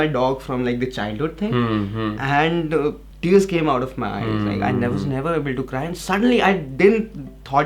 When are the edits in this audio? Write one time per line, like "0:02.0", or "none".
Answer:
0:03.1